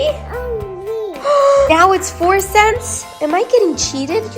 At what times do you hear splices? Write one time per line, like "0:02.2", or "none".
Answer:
0:01.7